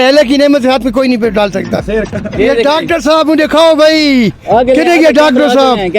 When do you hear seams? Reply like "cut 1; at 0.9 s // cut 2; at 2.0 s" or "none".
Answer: cut 1; at 2.2 s